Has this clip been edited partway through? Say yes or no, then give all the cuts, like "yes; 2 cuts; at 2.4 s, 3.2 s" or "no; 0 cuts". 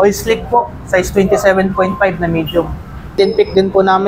yes; 1 cut; at 3.1 s